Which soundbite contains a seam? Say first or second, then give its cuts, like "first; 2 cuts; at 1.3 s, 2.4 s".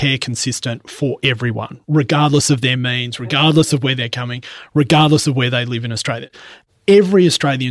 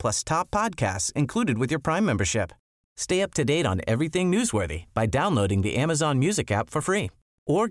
first; 1 cut; at 6.4 s